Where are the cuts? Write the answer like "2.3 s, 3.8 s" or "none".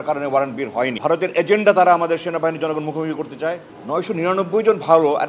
1.0 s, 3.7 s